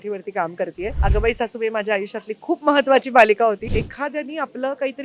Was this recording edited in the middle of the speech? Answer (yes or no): yes